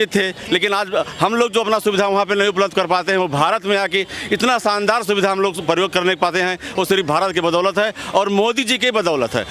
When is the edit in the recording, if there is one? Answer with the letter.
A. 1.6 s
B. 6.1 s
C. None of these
C